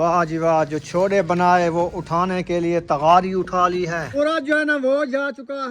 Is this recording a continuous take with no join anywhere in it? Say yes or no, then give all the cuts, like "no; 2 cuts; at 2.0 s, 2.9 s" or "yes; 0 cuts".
no; 1 cut; at 4.1 s